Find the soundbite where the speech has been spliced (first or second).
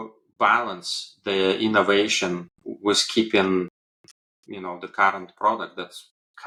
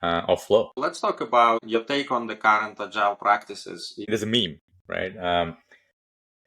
second